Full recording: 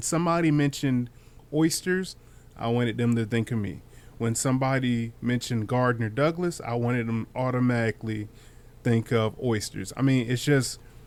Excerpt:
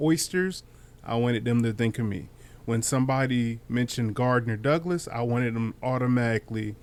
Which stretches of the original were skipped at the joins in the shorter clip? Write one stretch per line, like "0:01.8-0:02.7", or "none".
none